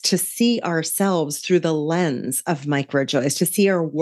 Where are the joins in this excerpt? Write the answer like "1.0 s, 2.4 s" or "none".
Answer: none